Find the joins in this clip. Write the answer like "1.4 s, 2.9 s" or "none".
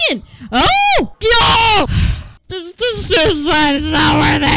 1.1 s